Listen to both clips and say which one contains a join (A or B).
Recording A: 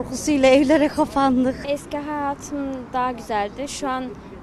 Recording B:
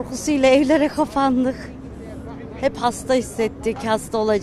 A